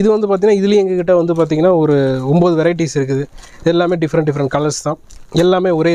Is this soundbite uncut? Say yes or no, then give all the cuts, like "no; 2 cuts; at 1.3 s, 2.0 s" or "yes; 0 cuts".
yes; 0 cuts